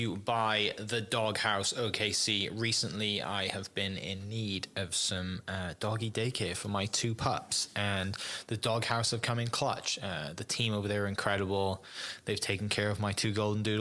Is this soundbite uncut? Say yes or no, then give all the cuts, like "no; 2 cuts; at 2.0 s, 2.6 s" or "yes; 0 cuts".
yes; 0 cuts